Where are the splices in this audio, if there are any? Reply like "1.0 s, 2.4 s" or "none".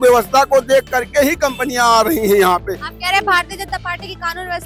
none

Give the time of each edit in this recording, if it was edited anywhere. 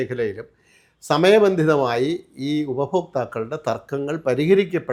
none

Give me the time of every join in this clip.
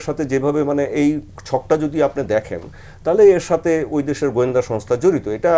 none

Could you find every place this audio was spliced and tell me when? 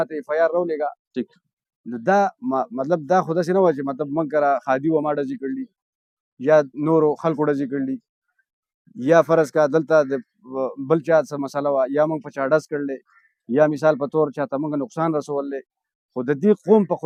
none

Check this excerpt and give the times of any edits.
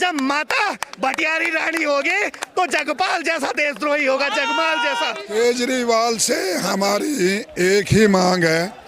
5.3 s

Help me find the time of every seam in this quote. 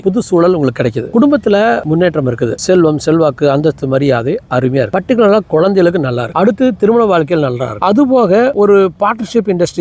none

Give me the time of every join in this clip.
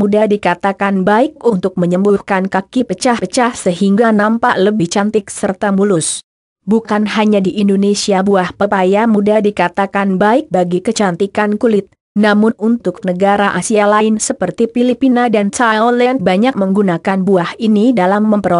1.3 s

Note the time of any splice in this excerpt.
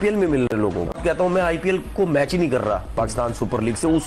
1.0 s

